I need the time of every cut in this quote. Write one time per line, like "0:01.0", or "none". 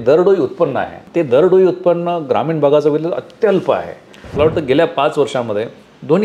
0:00.9
0:04.2